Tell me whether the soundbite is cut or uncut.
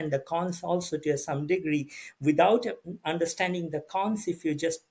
uncut